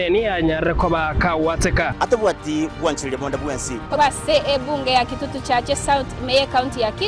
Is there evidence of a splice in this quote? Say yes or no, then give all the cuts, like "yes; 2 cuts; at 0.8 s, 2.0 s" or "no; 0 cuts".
yes; 1 cut; at 4.0 s